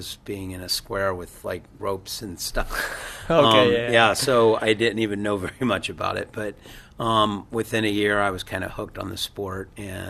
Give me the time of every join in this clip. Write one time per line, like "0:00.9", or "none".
none